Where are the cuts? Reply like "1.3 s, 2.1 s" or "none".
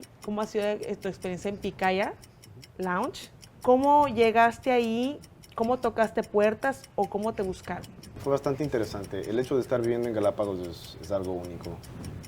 3.5 s, 8.1 s